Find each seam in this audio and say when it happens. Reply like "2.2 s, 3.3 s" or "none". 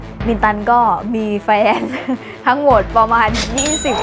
none